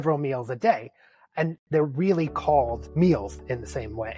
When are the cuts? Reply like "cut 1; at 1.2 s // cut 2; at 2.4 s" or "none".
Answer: cut 1; at 2.8 s